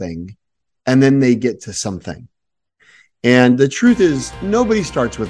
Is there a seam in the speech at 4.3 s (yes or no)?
yes